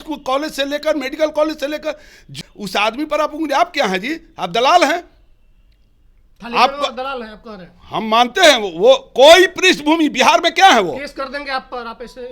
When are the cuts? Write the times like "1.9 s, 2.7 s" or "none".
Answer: 2.4 s